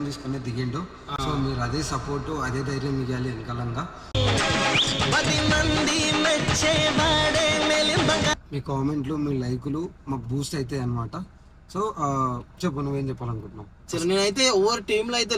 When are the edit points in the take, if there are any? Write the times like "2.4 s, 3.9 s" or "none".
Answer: none

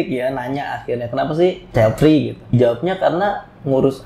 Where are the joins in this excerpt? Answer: 1.6 s, 2.5 s

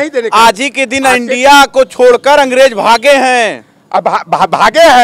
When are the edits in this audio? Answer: none

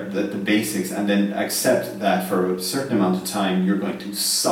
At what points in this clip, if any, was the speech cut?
none

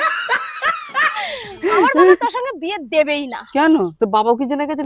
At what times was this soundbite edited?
1.3 s

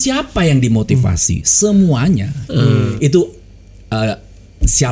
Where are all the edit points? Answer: 2.9 s

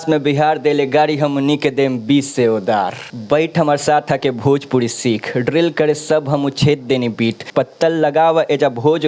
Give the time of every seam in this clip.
3.1 s, 7.5 s

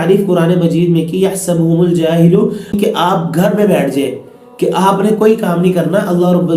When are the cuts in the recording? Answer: 2.8 s

